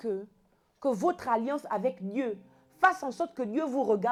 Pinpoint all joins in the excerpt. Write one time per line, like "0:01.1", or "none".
none